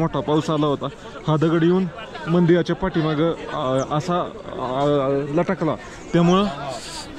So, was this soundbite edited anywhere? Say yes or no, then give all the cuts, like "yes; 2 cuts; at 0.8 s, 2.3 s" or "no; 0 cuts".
no; 0 cuts